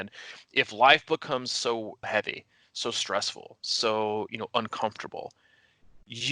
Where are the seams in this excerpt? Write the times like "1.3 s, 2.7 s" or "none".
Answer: 2.1 s